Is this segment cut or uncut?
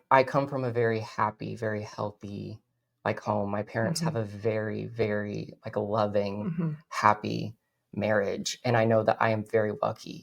uncut